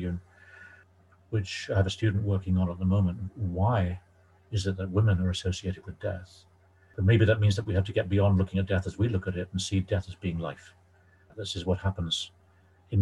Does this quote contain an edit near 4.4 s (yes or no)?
no